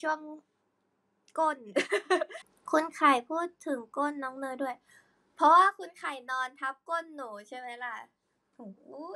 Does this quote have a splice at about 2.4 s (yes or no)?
yes